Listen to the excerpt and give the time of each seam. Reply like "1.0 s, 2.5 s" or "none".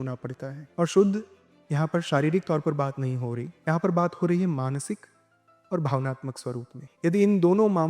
6.8 s